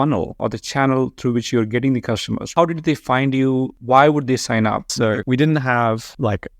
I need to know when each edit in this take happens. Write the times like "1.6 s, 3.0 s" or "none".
2.5 s, 3.8 s, 5.2 s